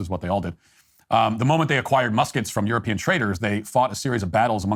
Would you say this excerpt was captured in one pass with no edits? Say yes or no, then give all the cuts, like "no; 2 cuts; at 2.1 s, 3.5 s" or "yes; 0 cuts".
yes; 0 cuts